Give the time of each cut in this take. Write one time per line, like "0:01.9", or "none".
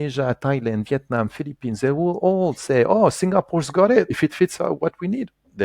0:04.1